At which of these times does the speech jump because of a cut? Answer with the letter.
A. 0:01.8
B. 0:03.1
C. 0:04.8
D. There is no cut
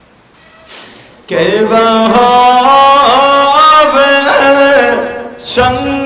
D